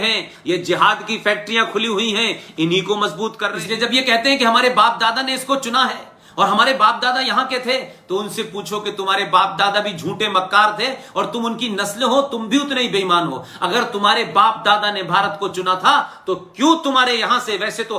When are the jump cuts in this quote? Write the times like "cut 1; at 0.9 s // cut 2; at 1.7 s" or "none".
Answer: cut 1; at 3.5 s